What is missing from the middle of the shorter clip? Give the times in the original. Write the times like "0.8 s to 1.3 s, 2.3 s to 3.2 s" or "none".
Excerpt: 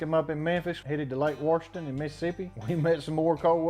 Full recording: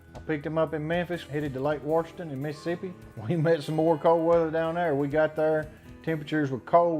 2.9 s to 3.1 s

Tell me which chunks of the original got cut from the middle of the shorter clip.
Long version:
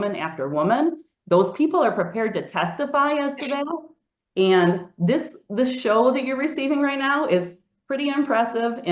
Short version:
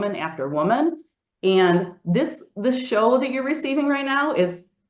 1.1 s to 4.0 s

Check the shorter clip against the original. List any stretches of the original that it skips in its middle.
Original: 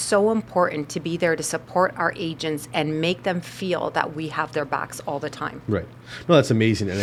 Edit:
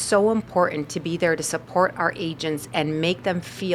none

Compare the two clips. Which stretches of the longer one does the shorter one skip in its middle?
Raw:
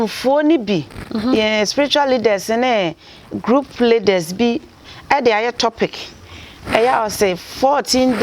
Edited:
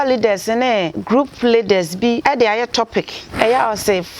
3.0 s to 3.3 s, 4.6 s to 5.1 s, 6.0 s to 6.5 s

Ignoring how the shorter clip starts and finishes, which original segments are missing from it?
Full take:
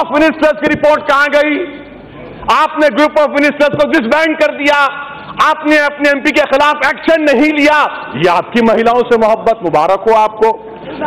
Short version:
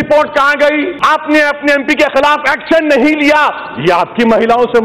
1.7 s to 5.3 s

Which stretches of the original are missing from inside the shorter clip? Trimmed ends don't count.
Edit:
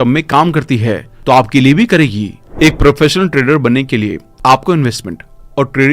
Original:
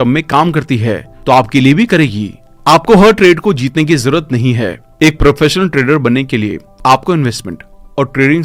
2.4 s to 4.8 s

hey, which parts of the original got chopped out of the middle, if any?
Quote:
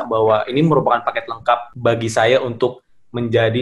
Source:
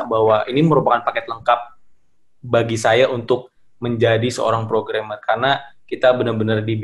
1.7 s to 2.4 s

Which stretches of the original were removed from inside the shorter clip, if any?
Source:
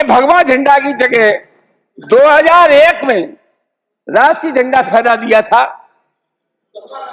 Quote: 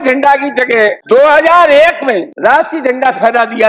1.4 s to 2.0 s, 3.3 s to 4.0 s

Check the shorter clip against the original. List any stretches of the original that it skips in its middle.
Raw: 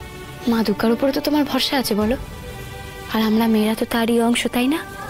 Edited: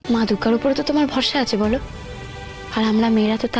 none

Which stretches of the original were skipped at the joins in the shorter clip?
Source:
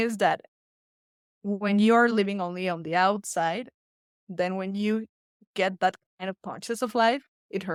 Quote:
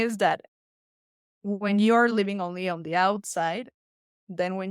none

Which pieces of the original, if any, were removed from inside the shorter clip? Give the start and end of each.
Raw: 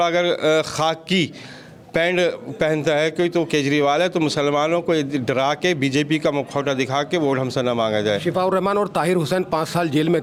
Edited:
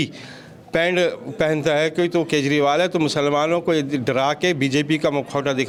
none

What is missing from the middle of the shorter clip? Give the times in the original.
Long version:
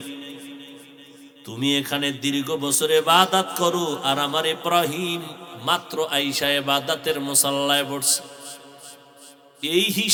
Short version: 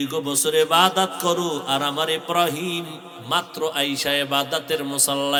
none

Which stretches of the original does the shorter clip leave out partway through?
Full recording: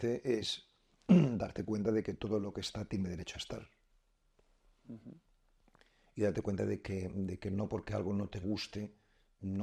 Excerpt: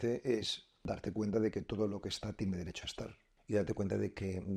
0.9 s to 1.4 s, 3.8 s to 6.0 s

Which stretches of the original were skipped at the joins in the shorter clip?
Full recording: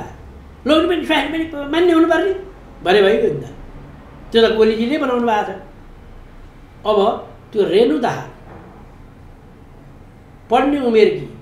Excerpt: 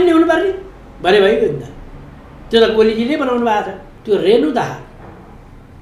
5.7 s to 7.3 s

